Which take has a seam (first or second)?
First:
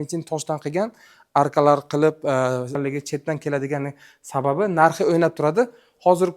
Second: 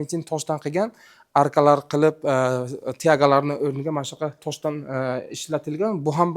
first